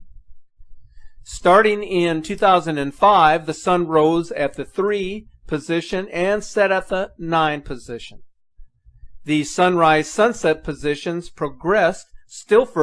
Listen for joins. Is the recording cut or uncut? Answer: uncut